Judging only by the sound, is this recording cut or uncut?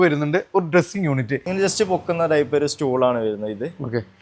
cut